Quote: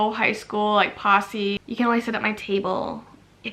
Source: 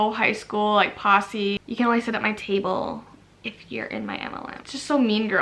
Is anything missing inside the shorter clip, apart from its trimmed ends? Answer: no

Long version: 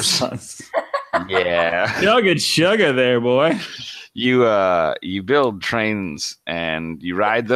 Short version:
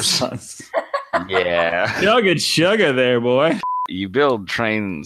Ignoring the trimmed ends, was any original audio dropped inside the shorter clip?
yes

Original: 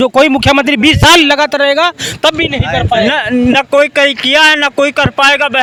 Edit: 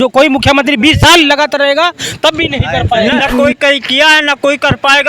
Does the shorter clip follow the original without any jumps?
no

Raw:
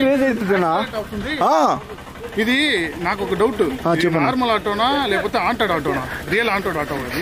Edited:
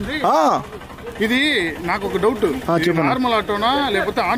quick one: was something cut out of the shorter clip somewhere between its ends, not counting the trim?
no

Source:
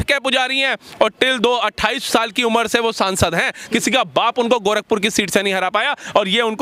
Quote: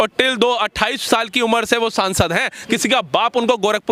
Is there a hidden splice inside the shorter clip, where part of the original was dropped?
no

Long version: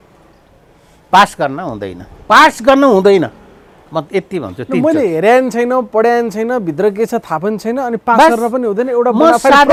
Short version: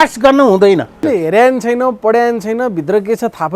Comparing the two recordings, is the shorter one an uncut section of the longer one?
no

